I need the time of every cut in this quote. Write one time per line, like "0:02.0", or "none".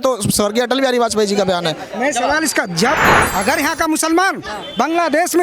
0:02.9